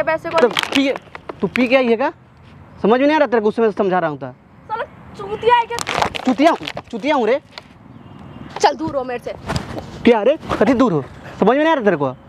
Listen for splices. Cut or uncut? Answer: cut